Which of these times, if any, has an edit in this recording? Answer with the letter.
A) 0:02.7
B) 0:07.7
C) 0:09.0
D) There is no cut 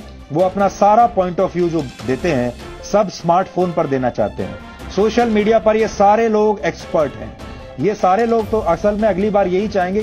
D